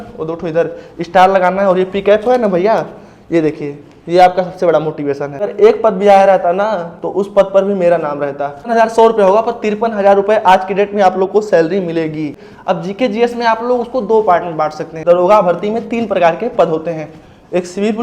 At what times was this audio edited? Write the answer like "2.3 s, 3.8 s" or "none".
5.4 s, 8.7 s, 12.5 s, 14.9 s

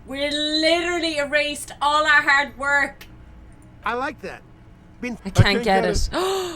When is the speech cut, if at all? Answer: 5.2 s

